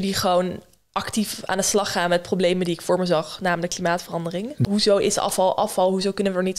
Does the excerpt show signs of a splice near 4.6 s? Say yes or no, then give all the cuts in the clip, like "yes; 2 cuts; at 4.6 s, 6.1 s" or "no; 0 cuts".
yes; 1 cut; at 4.6 s